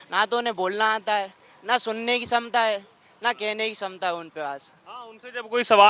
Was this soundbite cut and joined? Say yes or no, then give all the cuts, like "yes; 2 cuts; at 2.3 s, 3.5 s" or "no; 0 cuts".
no; 0 cuts